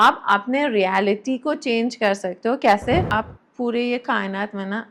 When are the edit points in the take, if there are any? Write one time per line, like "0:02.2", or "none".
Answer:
0:03.1